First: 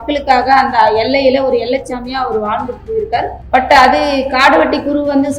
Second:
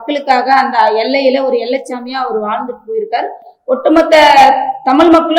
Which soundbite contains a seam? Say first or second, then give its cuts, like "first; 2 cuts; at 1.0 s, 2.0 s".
first; 1 cut; at 3.4 s